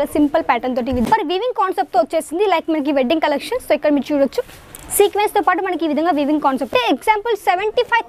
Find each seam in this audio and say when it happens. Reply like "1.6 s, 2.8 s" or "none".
1.1 s, 6.7 s